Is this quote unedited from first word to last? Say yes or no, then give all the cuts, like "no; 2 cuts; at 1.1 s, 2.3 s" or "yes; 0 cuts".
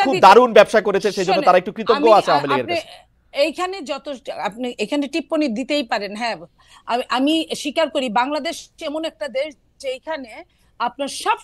yes; 0 cuts